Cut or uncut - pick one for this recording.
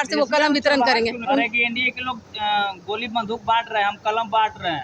cut